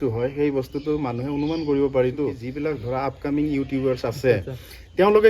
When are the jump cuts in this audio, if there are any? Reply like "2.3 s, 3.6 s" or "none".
2.5 s